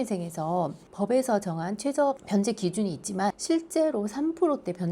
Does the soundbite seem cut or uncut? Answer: cut